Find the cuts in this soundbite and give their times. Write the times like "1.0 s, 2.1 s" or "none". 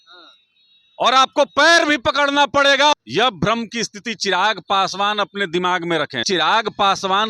2.9 s, 6.2 s